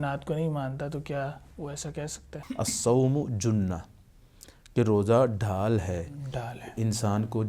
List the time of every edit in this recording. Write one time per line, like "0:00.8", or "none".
0:02.3